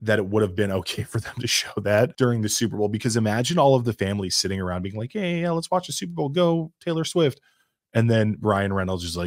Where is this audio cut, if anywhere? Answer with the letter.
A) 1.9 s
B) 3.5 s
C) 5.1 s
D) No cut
D